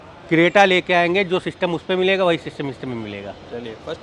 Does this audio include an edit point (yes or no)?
no